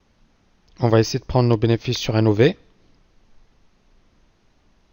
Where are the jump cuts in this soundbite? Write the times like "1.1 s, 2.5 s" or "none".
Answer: none